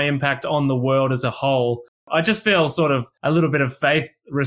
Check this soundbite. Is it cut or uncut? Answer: cut